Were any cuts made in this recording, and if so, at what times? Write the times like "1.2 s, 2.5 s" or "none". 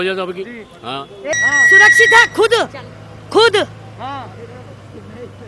1.1 s